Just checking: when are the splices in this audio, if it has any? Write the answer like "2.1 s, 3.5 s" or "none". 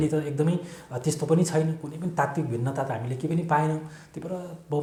none